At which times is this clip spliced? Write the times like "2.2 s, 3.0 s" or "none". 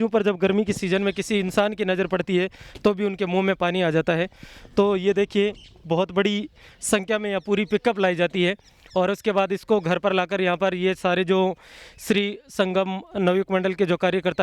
none